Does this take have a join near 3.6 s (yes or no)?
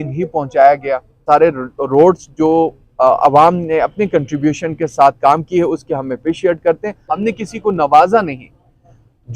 no